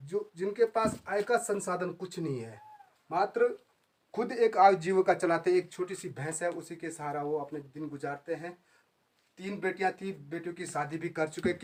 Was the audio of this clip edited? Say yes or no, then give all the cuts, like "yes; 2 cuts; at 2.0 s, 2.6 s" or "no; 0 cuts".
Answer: no; 0 cuts